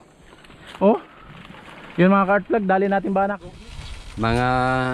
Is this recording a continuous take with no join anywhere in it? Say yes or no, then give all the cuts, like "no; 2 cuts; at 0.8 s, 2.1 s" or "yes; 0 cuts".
no; 1 cut; at 3.5 s